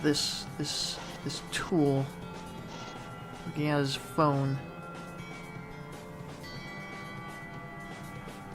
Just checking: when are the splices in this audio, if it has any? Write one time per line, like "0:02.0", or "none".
none